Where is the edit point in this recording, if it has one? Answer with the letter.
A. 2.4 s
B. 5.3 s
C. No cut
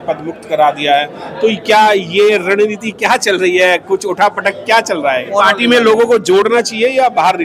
B